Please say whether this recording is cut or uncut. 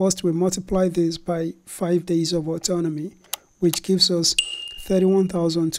uncut